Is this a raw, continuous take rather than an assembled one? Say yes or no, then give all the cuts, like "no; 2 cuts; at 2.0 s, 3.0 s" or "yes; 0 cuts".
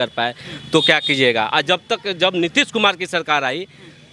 yes; 0 cuts